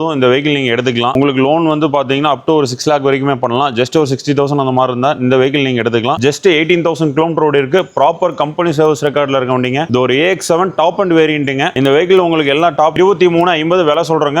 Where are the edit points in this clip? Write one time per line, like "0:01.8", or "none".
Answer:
0:01.1
0:06.2
0:12.9